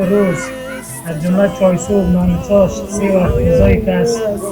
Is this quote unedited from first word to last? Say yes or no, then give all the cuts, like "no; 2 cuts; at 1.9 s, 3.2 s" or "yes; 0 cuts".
yes; 0 cuts